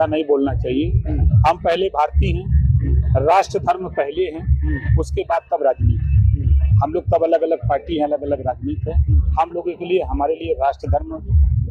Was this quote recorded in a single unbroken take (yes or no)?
yes